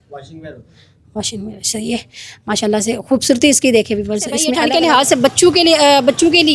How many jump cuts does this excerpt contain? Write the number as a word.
one